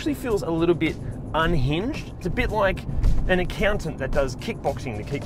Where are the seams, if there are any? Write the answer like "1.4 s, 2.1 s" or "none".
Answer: 2.1 s